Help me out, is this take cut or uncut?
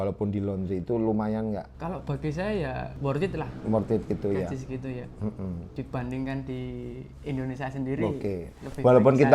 cut